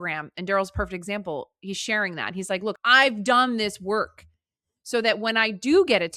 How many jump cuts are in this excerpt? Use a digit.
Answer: 1